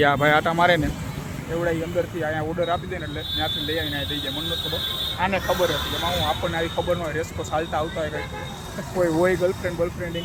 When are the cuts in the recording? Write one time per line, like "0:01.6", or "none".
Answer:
none